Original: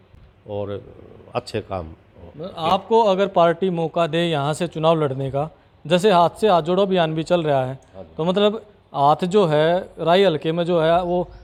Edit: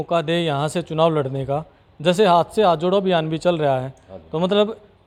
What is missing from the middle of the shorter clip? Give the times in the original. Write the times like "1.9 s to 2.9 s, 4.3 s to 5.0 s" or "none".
none